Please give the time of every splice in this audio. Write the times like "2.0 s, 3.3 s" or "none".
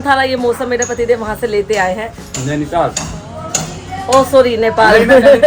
none